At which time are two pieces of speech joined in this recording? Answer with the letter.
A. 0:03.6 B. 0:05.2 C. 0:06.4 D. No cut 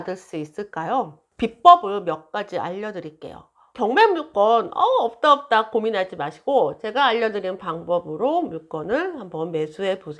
A